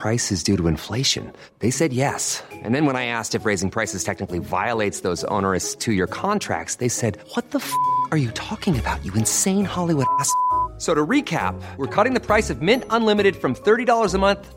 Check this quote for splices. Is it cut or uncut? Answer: uncut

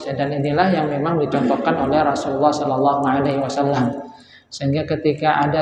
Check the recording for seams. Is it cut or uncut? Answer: uncut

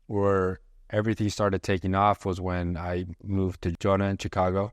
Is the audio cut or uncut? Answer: cut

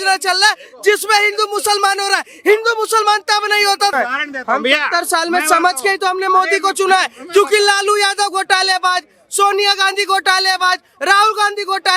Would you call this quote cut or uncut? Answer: cut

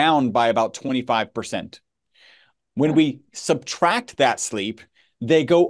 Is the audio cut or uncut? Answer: uncut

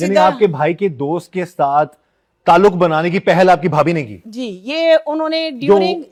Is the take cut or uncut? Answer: uncut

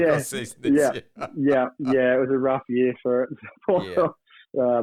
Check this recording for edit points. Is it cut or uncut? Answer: uncut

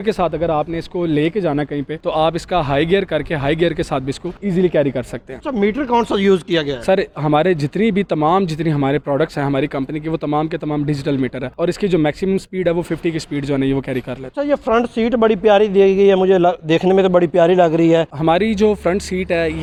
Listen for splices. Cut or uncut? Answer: uncut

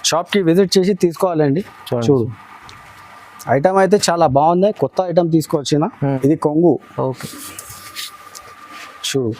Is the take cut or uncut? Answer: cut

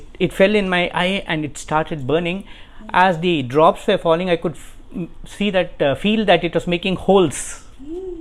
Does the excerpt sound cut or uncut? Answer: uncut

